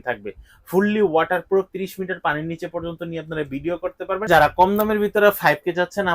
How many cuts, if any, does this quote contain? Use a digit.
1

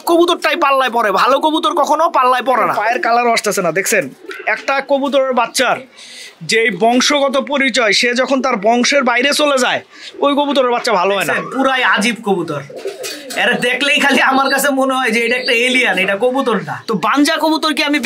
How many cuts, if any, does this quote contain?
3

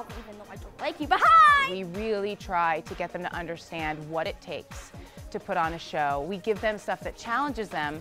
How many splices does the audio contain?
1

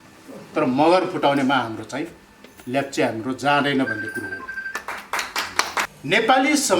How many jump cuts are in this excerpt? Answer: 1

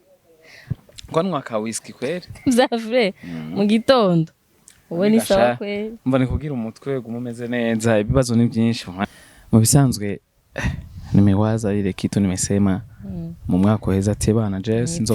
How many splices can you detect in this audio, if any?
1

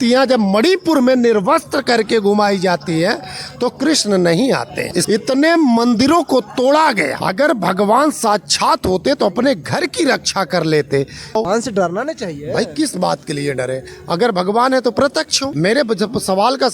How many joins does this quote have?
2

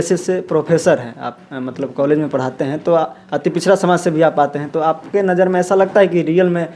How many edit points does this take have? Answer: 0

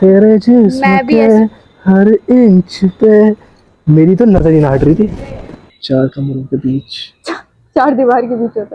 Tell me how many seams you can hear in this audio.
1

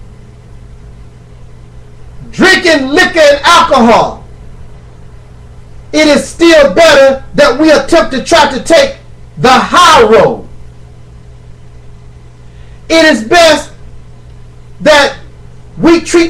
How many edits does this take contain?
0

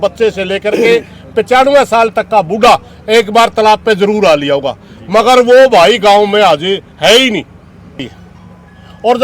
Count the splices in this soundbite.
1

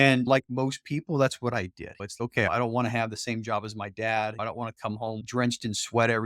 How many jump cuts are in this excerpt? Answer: 1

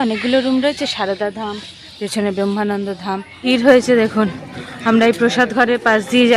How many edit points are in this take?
1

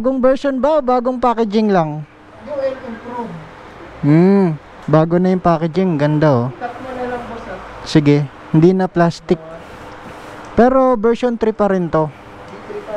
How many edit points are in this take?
0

